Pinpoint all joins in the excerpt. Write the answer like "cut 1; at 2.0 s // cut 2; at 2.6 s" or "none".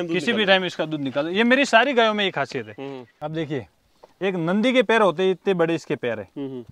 cut 1; at 3.1 s